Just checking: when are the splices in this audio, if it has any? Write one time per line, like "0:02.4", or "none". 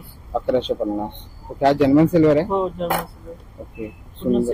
none